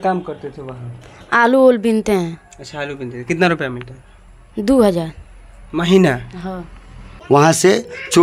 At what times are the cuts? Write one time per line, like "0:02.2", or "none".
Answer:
0:07.3